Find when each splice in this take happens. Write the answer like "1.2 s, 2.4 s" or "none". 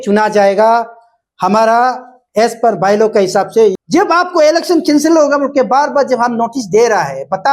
3.7 s